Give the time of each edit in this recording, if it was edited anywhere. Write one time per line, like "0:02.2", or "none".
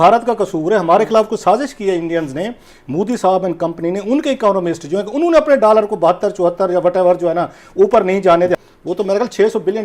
0:08.6